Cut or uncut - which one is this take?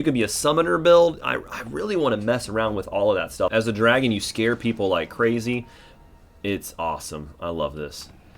cut